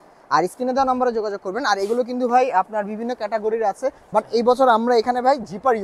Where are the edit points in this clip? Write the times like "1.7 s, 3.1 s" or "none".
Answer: 4.0 s